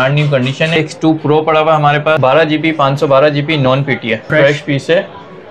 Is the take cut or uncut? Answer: cut